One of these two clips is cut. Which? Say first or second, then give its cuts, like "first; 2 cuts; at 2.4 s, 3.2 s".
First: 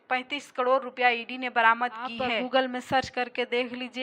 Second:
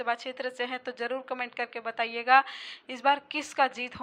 first; 1 cut; at 2.4 s